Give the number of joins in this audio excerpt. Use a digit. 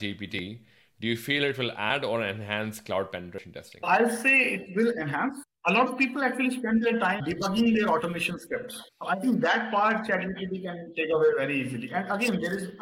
1